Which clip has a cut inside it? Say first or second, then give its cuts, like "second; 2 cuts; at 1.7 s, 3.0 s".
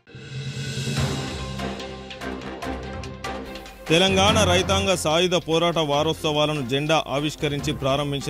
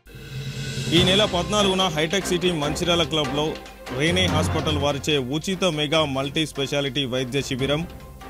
second; 1 cut; at 0.9 s